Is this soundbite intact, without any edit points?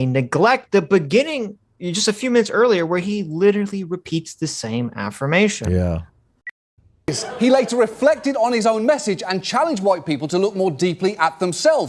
no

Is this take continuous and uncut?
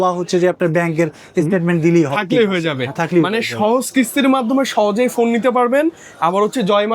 yes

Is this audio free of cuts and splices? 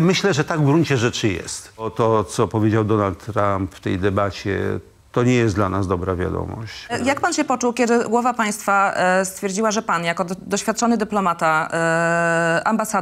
no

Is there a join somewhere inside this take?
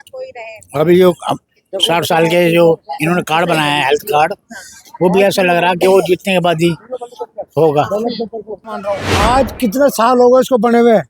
yes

